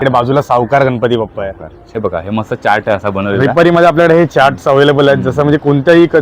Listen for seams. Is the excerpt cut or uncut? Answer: cut